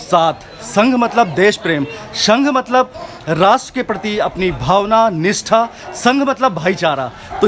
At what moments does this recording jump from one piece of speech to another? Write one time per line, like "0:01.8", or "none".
none